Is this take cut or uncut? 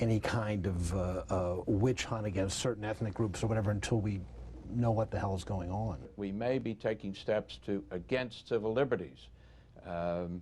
cut